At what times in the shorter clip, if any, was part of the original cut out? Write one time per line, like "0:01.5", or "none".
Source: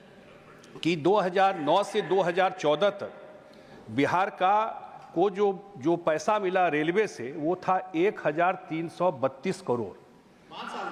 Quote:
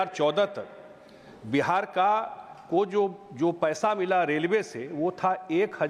none